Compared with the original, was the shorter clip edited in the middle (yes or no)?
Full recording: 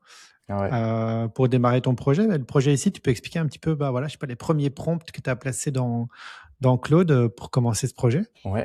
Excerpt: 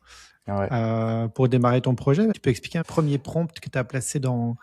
yes